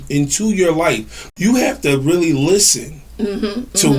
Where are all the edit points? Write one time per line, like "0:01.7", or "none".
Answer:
0:01.3